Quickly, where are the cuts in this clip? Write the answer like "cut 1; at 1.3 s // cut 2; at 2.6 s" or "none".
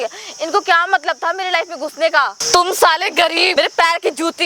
cut 1; at 2.4 s // cut 2; at 3.5 s